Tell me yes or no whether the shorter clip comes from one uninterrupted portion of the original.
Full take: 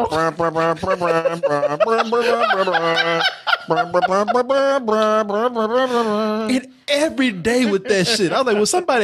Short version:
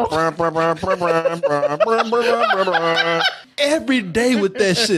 no